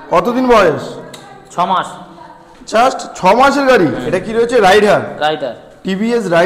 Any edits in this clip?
yes; 1 cut; at 4.0 s

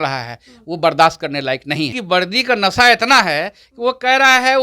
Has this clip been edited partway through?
yes; 1 cut; at 2.0 s

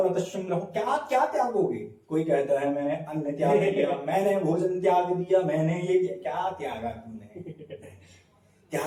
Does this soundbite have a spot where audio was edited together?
no; 0 cuts

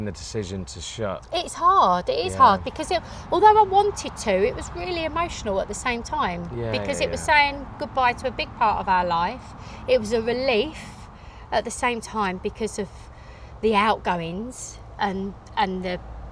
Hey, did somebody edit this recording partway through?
no; 0 cuts

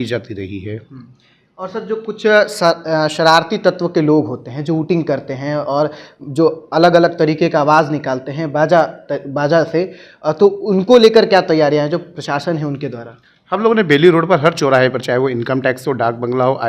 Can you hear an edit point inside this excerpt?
no; 0 cuts

